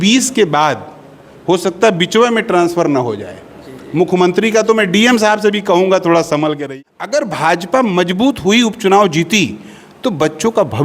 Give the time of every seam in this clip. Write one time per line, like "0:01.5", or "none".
0:06.6